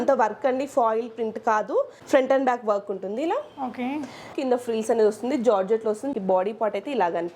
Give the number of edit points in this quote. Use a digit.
3